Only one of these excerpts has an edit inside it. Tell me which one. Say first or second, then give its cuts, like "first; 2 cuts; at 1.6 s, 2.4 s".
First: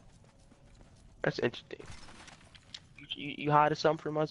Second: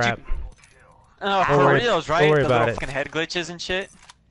second; 1 cut; at 2.8 s